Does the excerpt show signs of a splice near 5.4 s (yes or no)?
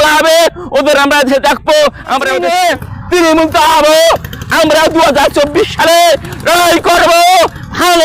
no